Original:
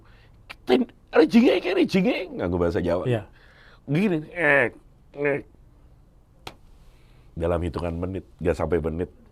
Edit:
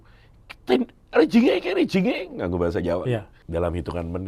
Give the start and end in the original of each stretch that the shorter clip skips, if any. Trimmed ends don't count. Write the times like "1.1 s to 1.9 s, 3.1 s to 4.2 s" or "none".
3.4 s to 7.2 s